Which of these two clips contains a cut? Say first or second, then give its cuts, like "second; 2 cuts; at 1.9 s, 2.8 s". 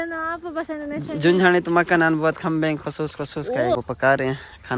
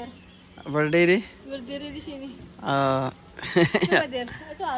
first; 1 cut; at 3.8 s